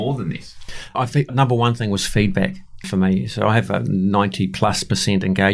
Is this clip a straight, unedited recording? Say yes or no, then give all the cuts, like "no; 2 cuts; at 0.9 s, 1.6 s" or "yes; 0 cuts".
no; 1 cut; at 1.0 s